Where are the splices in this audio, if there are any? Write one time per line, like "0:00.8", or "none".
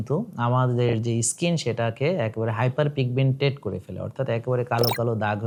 none

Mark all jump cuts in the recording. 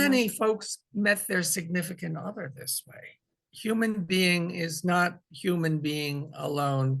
0:03.4

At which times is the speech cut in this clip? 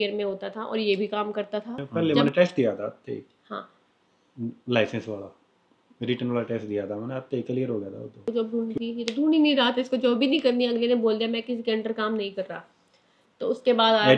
0:01.8
0:08.2

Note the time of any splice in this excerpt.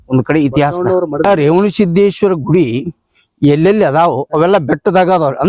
0:01.2

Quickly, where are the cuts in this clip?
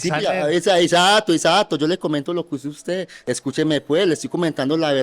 0:03.2

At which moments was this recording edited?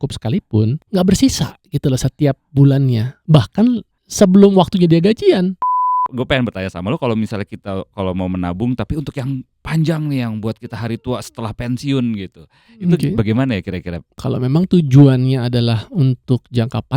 0:00.8
0:04.0
0:06.1
0:14.2

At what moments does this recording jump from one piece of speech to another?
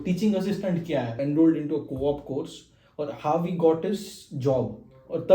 0:01.2

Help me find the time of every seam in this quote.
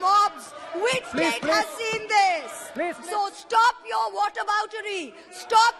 0:03.0

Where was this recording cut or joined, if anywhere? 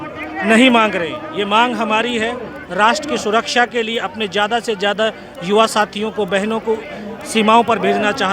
none

